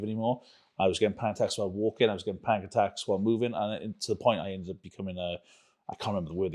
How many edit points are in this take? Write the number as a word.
zero